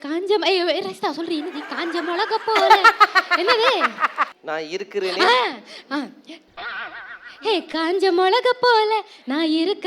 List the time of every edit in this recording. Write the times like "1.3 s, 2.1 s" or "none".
4.2 s